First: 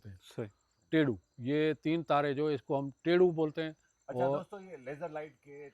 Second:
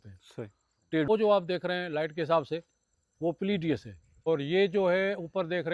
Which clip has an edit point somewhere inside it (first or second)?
second